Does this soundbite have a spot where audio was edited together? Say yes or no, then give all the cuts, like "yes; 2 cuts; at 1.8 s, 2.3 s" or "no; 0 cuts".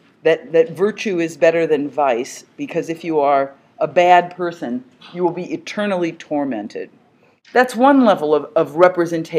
yes; 1 cut; at 5.0 s